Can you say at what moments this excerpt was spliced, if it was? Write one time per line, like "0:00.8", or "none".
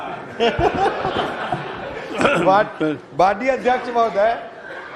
none